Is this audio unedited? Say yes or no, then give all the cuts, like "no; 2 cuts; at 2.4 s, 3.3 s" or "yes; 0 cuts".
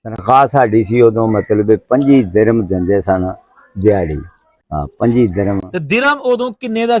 yes; 0 cuts